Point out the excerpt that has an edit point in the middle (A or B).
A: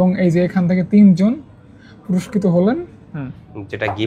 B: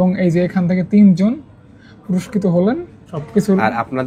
A